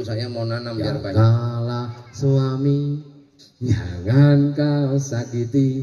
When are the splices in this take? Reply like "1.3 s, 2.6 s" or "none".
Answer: 1.1 s